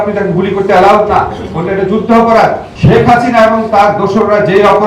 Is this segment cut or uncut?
cut